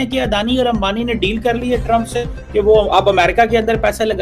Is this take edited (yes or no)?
no